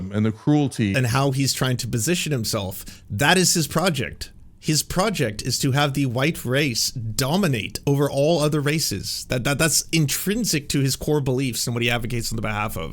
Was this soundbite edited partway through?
yes; 1 cut; at 0.9 s

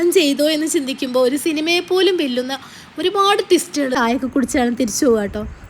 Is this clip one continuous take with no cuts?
no; 1 cut; at 4.0 s

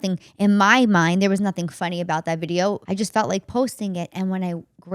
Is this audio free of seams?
no; 1 cut; at 2.8 s

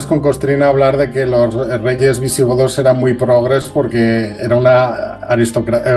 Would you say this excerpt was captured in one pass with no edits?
yes; 0 cuts

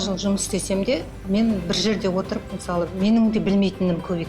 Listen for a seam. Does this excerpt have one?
yes; 1 cut; at 1.1 s

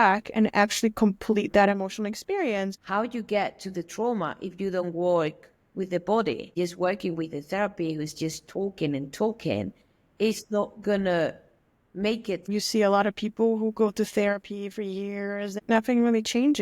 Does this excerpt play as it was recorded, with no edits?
no; 4 cuts; at 2.8 s, 6.5 s, 12.4 s, 15.6 s

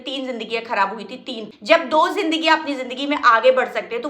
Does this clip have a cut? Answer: yes; 1 cut; at 1.5 s

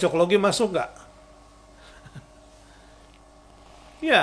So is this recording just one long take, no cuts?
yes; 0 cuts

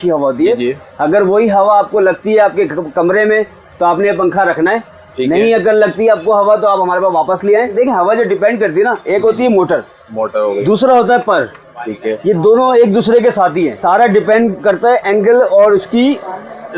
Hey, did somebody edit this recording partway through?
yes; 2 cuts; at 7.7 s, 13.8 s

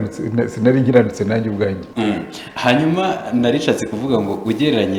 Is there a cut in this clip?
yes; 1 cut; at 1.8 s

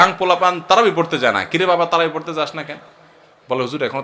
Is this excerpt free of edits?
yes; 0 cuts

